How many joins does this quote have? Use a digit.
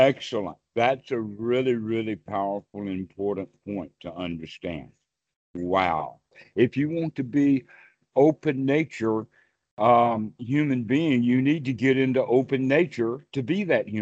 1